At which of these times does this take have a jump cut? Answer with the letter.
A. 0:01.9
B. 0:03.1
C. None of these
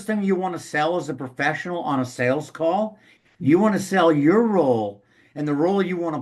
B